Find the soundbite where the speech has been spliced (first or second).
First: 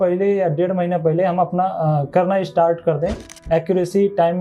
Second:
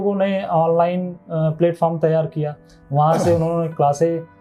first